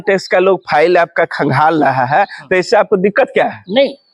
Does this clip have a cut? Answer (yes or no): no